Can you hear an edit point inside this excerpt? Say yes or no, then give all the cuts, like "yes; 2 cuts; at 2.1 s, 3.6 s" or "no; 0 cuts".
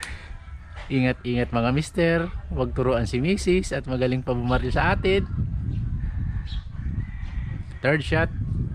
no; 0 cuts